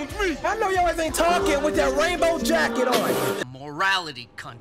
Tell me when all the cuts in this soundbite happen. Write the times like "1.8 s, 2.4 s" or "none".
3.4 s